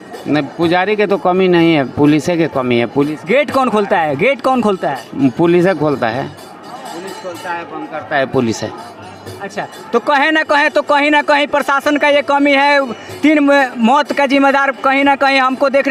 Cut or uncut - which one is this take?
uncut